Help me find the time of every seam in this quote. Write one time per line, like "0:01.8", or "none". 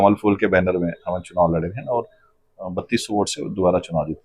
none